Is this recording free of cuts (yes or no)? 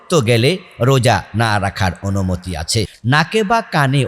no